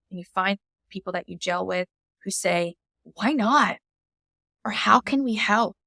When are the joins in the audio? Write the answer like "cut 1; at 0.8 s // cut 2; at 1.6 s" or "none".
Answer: none